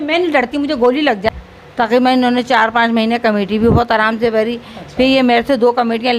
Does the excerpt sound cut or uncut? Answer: cut